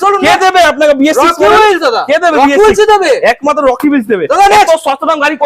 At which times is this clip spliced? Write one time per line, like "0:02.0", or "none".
none